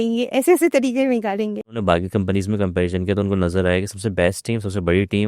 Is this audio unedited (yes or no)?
no